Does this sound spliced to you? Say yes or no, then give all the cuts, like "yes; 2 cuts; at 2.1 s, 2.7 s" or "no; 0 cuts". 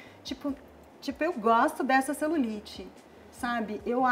no; 0 cuts